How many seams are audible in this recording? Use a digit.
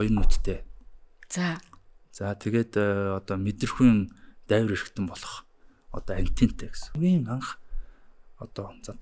1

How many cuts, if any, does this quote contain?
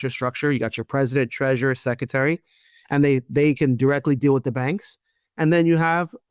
0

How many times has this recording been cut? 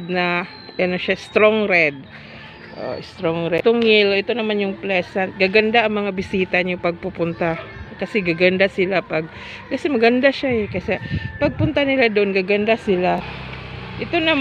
2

